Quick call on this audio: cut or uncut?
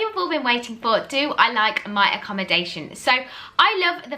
uncut